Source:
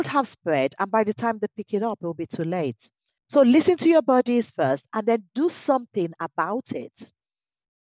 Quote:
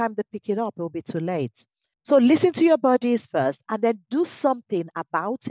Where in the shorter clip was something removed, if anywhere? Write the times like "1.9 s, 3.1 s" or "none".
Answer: none